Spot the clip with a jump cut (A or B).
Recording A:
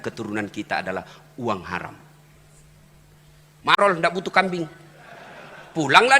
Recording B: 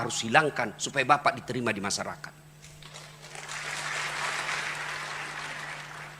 A